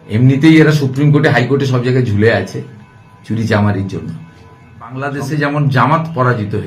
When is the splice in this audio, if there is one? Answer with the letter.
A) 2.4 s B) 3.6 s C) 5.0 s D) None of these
C